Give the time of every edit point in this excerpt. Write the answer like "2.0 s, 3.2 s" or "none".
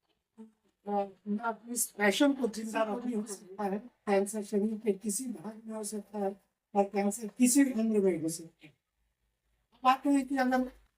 3.3 s